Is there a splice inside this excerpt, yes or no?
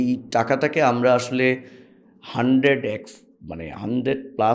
no